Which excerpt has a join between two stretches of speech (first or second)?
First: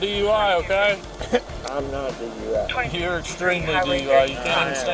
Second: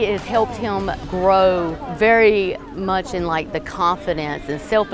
second